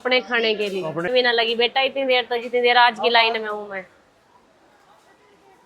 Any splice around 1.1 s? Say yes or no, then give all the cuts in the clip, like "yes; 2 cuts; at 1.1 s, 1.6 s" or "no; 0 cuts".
yes; 1 cut; at 1.1 s